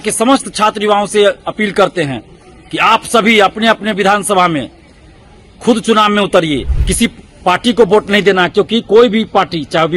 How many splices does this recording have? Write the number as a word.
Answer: one